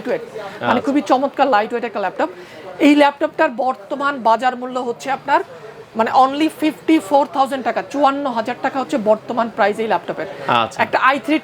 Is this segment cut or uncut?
uncut